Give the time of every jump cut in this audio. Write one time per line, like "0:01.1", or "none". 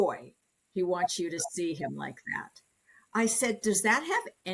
none